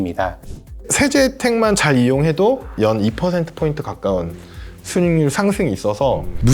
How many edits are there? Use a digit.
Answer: 2